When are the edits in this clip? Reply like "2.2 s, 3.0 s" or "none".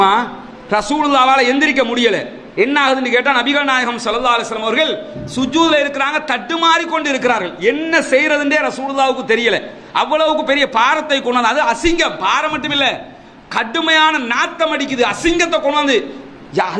none